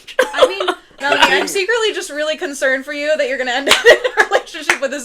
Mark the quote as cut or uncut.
cut